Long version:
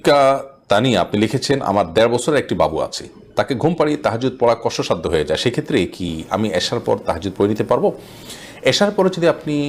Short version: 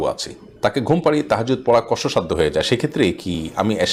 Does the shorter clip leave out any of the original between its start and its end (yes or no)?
no